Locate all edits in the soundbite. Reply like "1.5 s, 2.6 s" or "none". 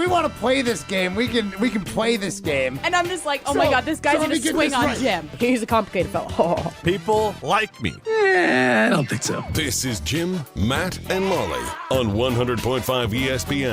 9.5 s, 11.7 s